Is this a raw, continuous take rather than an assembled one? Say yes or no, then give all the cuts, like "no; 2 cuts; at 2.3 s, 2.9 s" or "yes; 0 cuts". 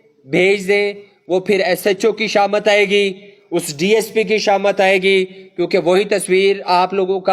yes; 0 cuts